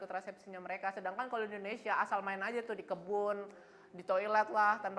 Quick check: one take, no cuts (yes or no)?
yes